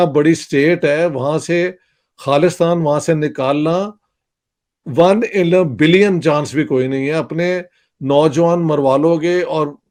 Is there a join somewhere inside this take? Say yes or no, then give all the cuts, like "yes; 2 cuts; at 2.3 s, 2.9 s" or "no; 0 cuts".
no; 0 cuts